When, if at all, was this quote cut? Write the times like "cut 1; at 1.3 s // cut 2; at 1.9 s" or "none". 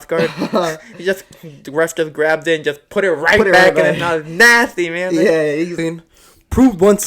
cut 1; at 5.7 s